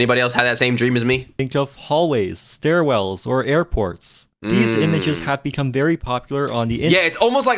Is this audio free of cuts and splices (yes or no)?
yes